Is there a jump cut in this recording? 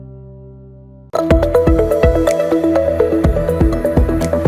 yes; 1 cut; at 1.0 s

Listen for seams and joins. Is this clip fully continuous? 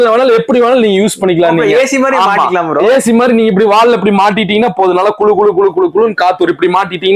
yes; 0 cuts

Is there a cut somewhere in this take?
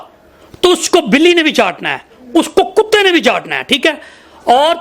no; 0 cuts

